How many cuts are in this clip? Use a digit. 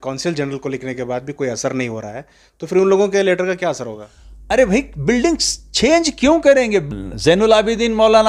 1